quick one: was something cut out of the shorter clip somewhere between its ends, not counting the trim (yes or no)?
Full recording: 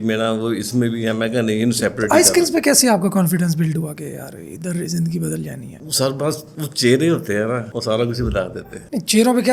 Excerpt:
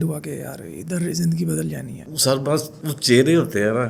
no